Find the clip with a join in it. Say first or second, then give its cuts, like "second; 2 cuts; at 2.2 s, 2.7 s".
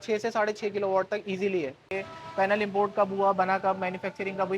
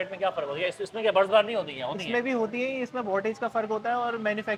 first; 1 cut; at 1.9 s